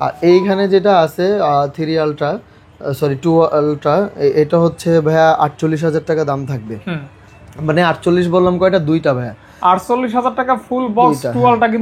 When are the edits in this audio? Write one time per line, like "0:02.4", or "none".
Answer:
none